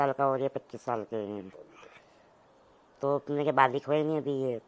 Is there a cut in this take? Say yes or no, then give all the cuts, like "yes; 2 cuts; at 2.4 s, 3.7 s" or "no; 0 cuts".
no; 0 cuts